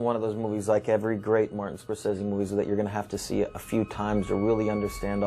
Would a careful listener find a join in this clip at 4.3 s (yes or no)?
no